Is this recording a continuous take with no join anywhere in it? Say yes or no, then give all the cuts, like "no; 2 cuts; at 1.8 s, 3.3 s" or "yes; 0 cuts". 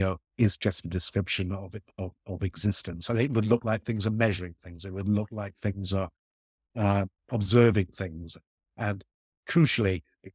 yes; 0 cuts